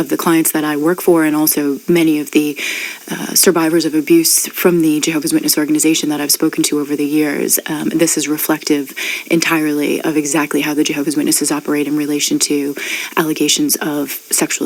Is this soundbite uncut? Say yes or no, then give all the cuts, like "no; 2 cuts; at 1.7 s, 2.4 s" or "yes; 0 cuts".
yes; 0 cuts